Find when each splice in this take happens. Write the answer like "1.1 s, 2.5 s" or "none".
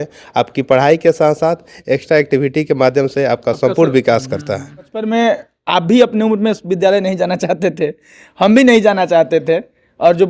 5.0 s